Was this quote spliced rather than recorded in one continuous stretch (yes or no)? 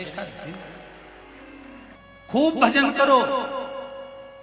yes